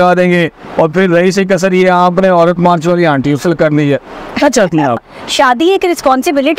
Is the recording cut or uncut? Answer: cut